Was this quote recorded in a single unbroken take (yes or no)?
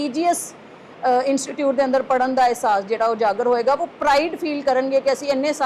yes